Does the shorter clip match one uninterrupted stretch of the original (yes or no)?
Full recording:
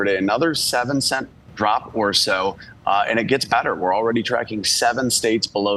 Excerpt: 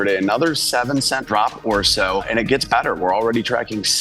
no